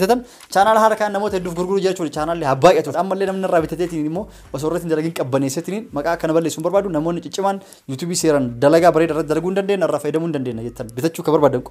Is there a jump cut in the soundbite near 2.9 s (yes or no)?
yes